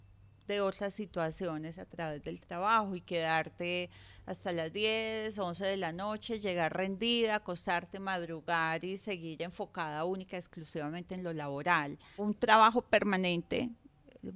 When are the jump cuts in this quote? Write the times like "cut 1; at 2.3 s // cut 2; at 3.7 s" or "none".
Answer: cut 1; at 12.2 s